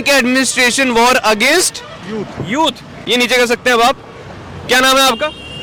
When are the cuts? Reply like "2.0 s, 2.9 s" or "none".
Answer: none